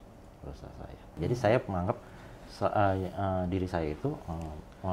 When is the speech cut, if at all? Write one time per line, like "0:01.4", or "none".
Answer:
0:01.1